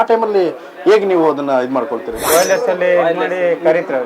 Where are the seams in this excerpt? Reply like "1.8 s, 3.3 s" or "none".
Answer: 2.2 s